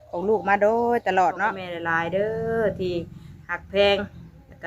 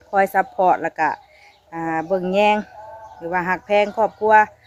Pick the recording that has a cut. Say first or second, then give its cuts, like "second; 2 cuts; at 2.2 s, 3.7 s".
first; 1 cut; at 1.7 s